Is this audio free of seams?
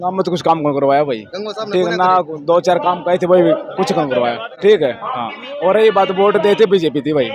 yes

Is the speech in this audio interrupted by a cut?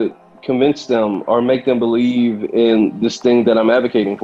no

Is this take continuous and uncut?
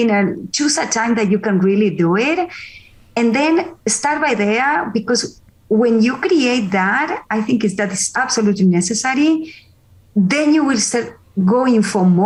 yes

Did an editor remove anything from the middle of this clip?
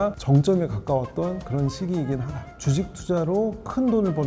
yes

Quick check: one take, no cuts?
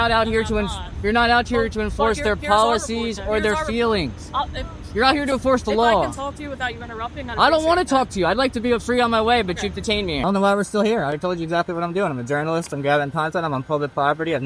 no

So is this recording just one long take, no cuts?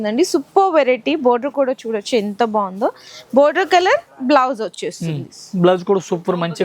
yes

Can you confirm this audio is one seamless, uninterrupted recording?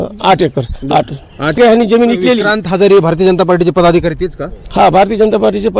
no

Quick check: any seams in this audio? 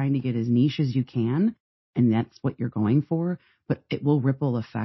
no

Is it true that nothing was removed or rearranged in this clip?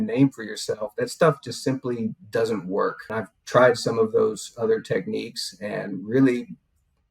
no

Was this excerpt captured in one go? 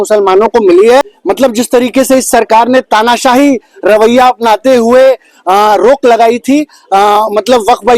no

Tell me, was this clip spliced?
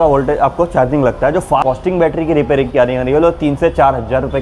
yes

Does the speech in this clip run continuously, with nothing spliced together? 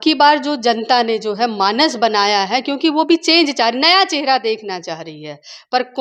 yes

